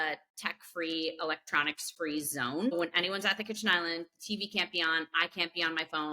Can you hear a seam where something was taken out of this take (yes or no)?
yes